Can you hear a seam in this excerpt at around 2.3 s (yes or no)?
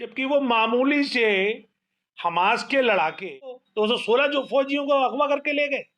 no